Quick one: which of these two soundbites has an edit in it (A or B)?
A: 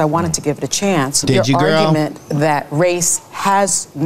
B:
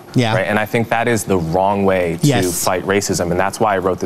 A